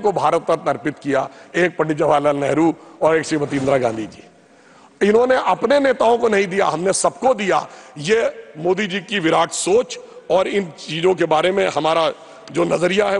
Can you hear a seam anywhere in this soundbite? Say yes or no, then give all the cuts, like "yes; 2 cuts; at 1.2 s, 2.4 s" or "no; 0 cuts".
no; 0 cuts